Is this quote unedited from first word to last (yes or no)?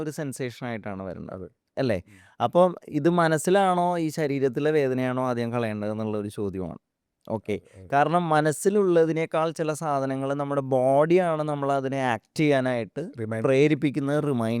yes